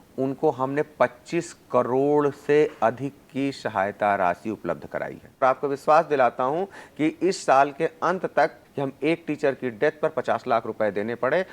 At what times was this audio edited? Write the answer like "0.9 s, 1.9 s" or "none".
5.4 s, 8.6 s

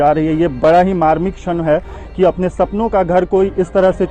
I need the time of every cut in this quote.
none

